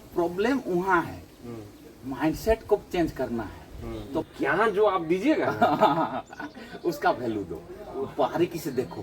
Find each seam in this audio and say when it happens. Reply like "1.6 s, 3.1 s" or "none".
4.2 s